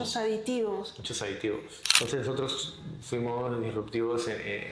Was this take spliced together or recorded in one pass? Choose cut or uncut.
cut